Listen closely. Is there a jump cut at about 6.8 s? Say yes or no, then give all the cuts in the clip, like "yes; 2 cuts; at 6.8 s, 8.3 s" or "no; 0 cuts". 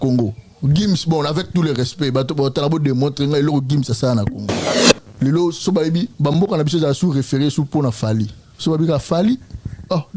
no; 1 cut; at 5.0 s